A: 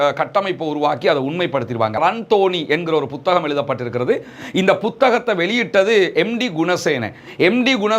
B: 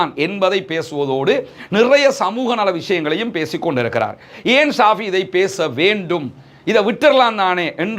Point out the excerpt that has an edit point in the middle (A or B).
A